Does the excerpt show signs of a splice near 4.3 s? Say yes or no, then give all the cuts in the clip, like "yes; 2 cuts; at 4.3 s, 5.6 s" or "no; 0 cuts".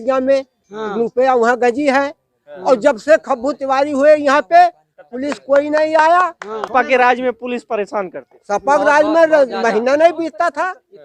no; 1 cut; at 6.7 s